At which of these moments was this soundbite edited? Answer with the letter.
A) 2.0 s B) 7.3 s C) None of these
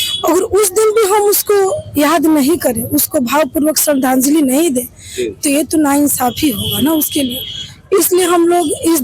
C